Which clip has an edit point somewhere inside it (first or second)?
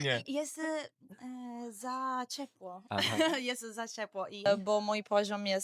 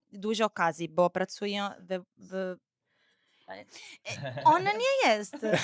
first